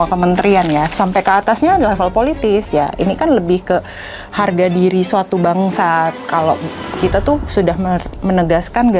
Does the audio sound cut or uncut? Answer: cut